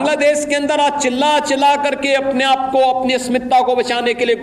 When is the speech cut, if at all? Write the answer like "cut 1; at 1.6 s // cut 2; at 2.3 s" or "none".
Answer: none